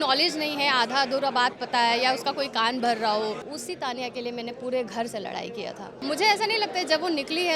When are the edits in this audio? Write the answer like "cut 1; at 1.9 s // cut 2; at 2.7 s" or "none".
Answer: cut 1; at 3.5 s // cut 2; at 6.0 s